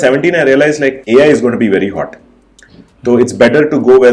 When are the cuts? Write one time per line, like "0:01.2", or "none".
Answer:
0:01.0